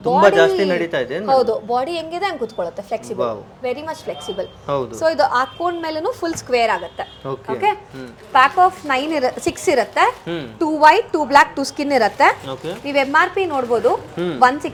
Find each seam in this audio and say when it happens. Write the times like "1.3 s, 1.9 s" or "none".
none